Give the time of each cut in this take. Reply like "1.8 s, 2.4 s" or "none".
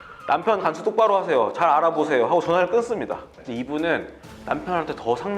3.3 s